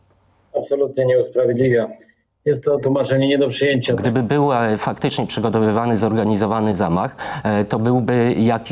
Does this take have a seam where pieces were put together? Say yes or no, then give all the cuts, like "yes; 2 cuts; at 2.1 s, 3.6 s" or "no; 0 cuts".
yes; 1 cut; at 4.0 s